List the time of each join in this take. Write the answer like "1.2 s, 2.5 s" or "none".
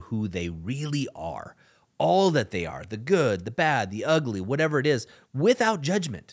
none